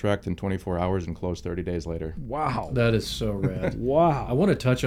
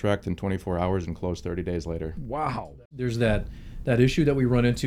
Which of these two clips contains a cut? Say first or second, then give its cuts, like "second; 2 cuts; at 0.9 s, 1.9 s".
second; 1 cut; at 2.7 s